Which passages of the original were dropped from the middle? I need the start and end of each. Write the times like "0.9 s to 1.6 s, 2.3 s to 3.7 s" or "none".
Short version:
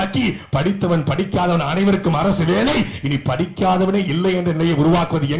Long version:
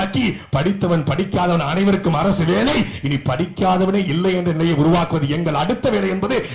none